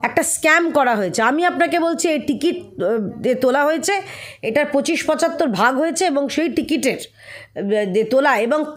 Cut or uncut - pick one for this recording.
uncut